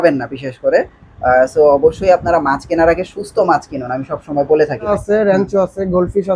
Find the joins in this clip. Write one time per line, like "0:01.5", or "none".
0:04.9